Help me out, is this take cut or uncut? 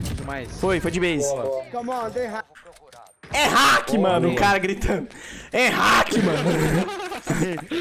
uncut